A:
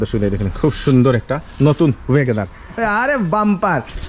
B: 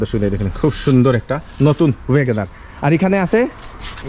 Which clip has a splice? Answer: A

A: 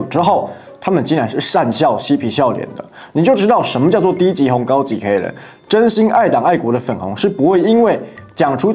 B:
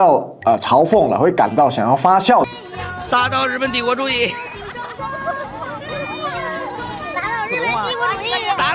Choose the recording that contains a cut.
B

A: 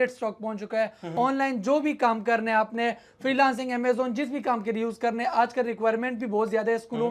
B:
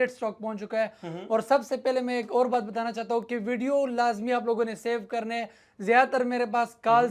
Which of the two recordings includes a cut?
A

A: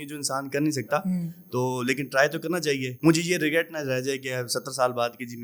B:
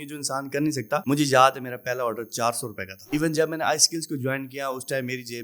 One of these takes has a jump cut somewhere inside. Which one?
B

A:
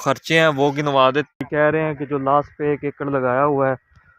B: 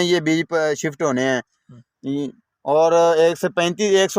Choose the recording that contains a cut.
A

